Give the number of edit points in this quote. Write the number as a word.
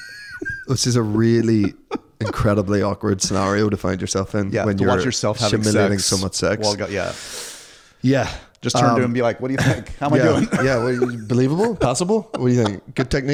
zero